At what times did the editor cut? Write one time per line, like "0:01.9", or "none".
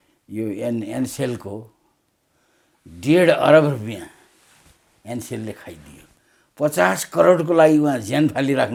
none